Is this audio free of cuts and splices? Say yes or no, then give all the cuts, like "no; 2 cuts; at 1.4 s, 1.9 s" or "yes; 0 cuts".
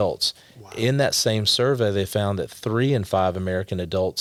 yes; 0 cuts